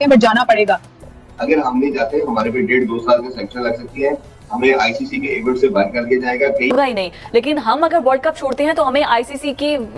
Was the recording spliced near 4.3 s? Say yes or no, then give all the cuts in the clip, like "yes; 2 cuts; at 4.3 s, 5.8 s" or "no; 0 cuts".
no; 2 cuts; at 0.9 s, 6.7 s